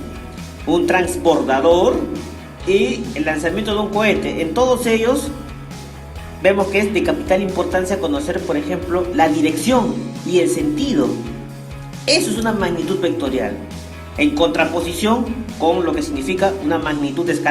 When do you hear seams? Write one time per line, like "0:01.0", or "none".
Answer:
0:12.8

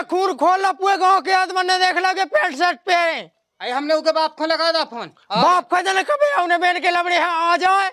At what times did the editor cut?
none

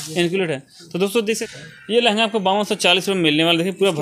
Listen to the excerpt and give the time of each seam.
0:01.4

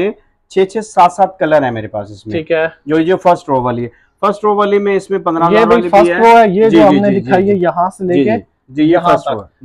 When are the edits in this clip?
none

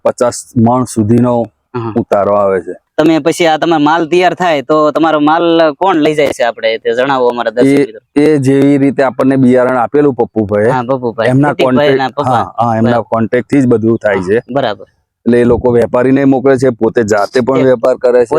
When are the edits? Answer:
0:02.8

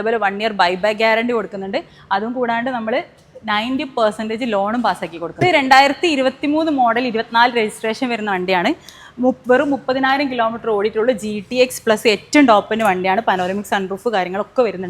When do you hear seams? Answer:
0:05.4

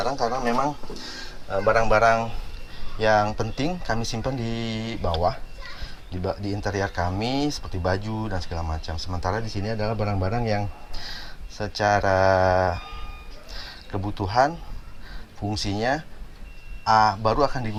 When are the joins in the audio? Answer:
none

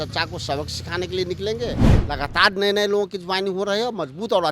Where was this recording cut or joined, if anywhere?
0:01.9

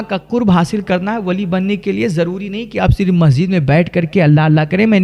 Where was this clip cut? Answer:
none

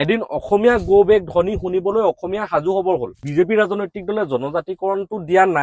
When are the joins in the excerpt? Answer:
0:03.2

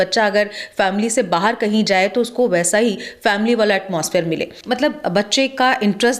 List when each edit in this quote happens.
0:04.6

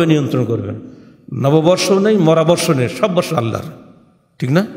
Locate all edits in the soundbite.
none

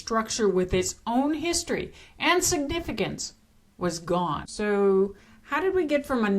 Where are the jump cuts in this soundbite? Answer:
0:04.5

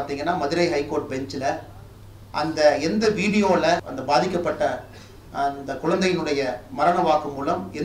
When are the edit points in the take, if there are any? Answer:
0:03.9

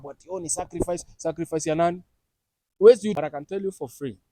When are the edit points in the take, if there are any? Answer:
0:03.2

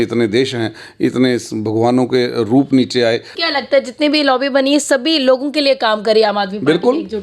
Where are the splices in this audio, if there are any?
0:03.4

